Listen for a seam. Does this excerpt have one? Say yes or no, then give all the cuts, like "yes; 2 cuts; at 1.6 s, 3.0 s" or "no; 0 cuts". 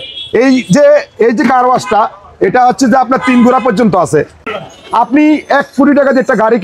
yes; 1 cut; at 4.5 s